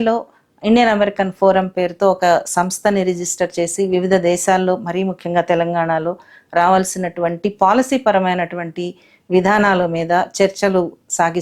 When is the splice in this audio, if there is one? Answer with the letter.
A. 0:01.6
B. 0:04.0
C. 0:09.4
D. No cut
D